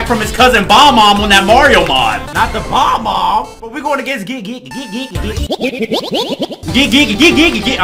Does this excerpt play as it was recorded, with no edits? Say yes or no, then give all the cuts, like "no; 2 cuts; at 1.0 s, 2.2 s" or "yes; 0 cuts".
no; 2 cuts; at 2.2 s, 6.6 s